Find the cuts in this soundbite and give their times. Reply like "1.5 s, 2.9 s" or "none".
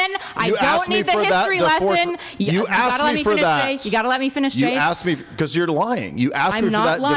none